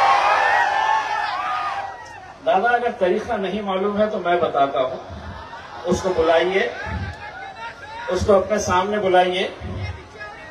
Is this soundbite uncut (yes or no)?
yes